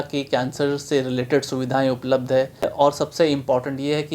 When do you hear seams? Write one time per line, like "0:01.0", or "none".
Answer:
0:02.7